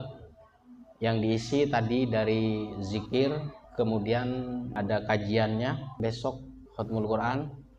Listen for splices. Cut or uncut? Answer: uncut